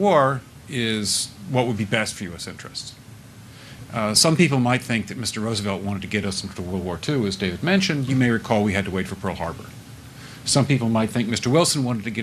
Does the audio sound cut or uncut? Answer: cut